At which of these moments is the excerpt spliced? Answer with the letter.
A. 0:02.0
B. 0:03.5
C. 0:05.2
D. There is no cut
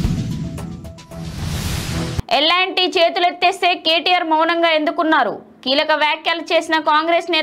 A